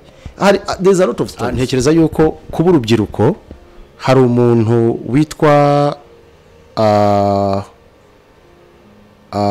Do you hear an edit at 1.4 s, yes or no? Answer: yes